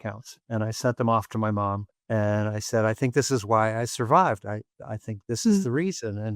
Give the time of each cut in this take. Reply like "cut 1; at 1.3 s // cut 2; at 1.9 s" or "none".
cut 1; at 1.9 s